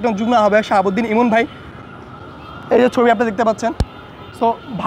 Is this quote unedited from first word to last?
yes; 0 cuts

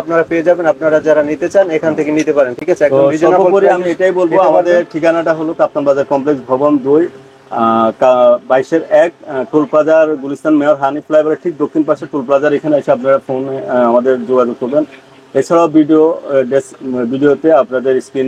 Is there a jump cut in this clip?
no; 0 cuts

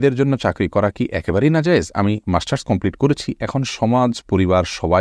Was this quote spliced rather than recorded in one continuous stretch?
no; 0 cuts

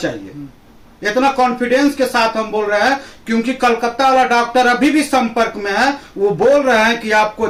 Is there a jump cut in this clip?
no; 0 cuts

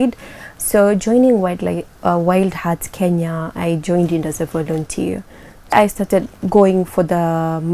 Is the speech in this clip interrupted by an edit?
yes; 1 cut; at 5.7 s

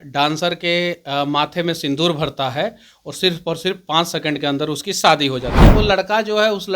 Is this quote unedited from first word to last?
no; 1 cut; at 5.5 s

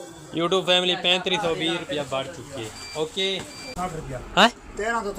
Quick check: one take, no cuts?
no; 1 cut; at 3.9 s

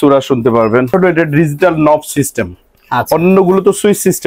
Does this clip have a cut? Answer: yes; 1 cut; at 0.9 s

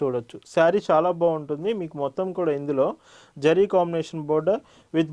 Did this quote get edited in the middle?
no; 0 cuts

